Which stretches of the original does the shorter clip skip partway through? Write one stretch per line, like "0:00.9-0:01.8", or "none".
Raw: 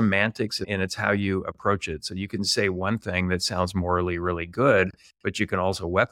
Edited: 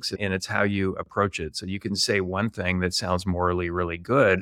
none